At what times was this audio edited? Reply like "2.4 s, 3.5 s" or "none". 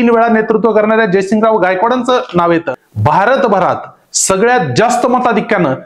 2.8 s